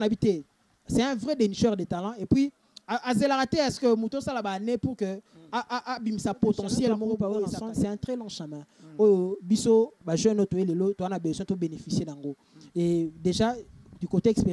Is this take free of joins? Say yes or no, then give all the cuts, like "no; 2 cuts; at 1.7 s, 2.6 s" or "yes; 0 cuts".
no; 1 cut; at 7.2 s